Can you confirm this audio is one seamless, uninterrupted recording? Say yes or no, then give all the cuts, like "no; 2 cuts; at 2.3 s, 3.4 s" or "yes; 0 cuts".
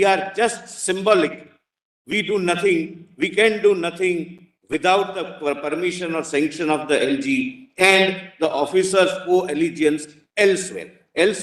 yes; 0 cuts